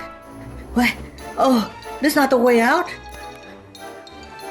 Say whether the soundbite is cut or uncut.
uncut